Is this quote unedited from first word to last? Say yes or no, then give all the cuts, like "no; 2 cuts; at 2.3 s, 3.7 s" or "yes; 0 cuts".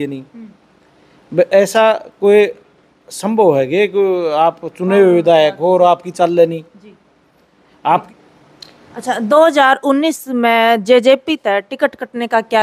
no; 1 cut; at 8.1 s